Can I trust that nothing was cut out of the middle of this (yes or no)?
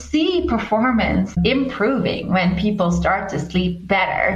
no